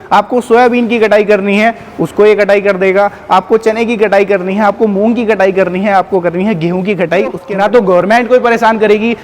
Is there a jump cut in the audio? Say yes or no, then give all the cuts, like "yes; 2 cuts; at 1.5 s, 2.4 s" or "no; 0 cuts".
yes; 1 cut; at 7.4 s